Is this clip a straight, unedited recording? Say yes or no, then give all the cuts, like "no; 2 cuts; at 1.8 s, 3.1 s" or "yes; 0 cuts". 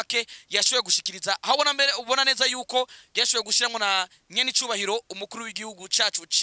yes; 0 cuts